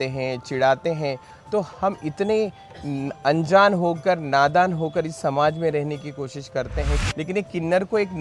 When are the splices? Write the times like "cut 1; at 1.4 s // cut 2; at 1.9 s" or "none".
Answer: cut 1; at 7.0 s